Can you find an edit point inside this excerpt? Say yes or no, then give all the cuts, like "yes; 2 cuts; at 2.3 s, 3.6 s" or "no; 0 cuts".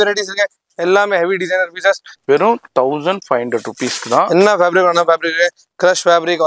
yes; 1 cut; at 2.1 s